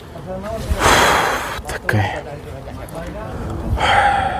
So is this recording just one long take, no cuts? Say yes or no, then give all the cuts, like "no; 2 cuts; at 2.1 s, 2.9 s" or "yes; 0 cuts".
no; 1 cut; at 3.3 s